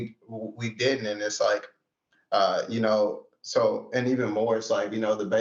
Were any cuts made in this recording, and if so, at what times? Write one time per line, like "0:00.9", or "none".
none